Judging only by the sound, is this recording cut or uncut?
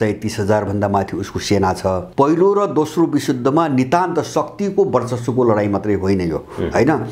cut